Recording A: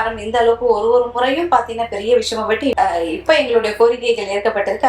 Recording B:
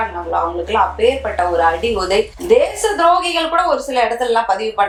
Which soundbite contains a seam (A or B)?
A